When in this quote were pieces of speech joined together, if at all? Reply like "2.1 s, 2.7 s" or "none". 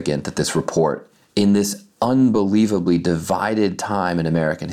none